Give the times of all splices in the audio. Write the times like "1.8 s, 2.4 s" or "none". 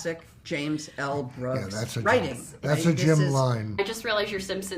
3.8 s